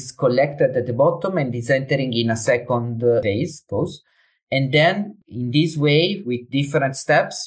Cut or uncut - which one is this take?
cut